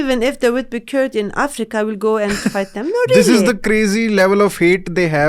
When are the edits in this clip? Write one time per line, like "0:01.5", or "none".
none